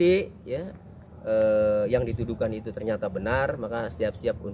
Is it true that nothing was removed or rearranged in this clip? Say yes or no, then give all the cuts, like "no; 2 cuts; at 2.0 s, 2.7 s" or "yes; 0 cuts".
yes; 0 cuts